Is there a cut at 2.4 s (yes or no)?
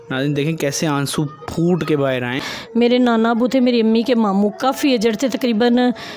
yes